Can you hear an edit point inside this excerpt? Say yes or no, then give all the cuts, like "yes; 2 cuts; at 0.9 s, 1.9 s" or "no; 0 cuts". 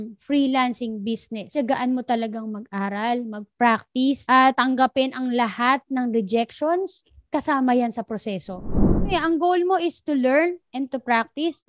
yes; 2 cuts; at 1.5 s, 9.0 s